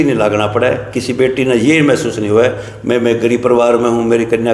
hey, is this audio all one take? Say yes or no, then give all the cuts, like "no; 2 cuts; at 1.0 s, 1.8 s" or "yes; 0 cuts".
yes; 0 cuts